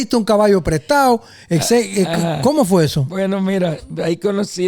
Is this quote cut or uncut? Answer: uncut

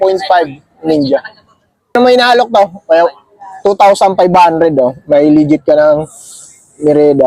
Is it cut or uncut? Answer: cut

